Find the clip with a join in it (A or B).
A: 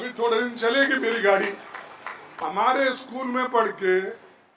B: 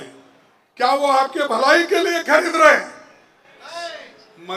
A